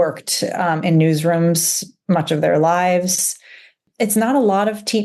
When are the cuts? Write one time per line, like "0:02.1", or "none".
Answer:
0:03.7